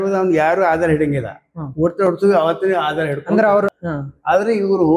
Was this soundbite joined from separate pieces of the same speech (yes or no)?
yes